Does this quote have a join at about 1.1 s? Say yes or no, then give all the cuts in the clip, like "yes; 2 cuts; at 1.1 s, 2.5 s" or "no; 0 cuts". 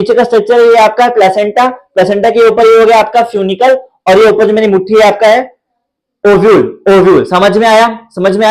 no; 0 cuts